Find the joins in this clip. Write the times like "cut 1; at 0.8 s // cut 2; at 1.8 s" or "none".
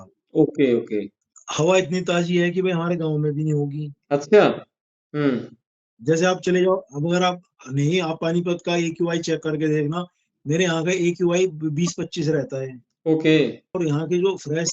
cut 1; at 1.2 s // cut 2; at 13.7 s